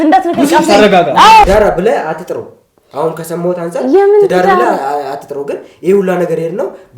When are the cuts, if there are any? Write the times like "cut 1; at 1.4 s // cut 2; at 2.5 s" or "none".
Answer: cut 1; at 1.4 s

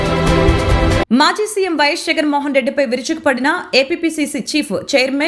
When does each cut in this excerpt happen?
cut 1; at 1.0 s

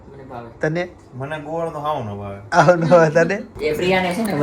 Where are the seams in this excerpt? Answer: cut 1; at 3.5 s

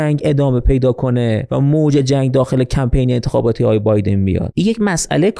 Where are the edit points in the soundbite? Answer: cut 1; at 1.5 s // cut 2; at 4.5 s

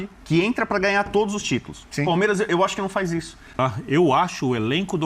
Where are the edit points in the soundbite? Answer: cut 1; at 3.5 s

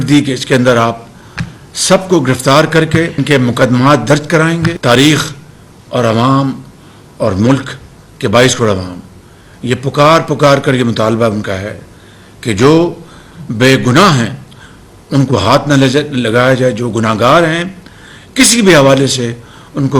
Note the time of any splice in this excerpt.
cut 1; at 4.8 s

